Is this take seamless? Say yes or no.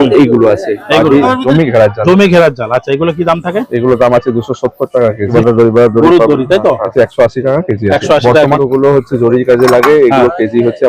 no